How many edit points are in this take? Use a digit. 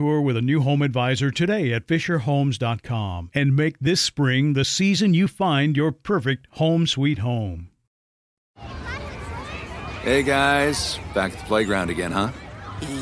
1